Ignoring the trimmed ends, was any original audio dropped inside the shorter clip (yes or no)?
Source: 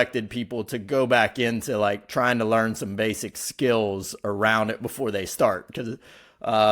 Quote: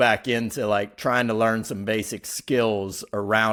no